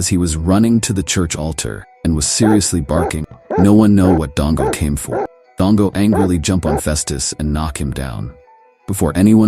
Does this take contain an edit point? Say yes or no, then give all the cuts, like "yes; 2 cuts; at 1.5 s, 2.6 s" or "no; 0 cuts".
yes; 1 cut; at 5.4 s